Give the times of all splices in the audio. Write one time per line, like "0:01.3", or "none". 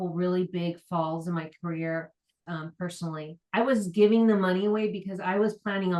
0:03.3